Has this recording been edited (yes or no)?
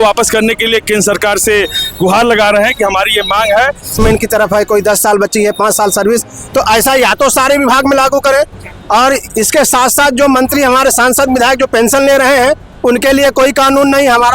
yes